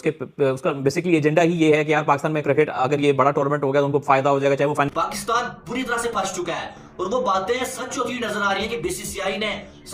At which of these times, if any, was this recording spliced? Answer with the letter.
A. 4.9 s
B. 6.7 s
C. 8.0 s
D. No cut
A